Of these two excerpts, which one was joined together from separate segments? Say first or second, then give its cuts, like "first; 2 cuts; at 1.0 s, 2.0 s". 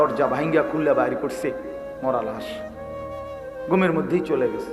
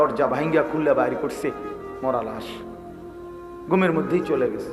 second; 2 cuts; at 2.4 s, 3.7 s